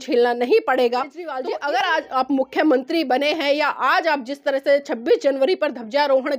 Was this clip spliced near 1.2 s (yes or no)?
yes